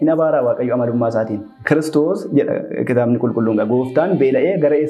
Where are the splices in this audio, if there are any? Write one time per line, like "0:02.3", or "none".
0:01.5